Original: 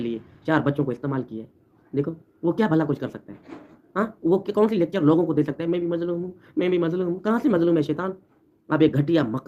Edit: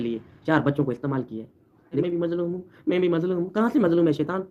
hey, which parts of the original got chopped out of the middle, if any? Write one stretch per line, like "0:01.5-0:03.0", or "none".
0:02.0-0:05.7